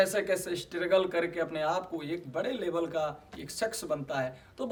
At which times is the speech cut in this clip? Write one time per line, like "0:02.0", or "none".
none